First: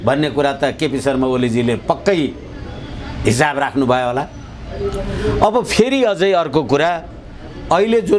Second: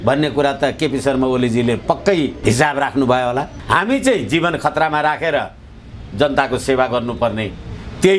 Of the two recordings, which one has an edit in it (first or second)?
second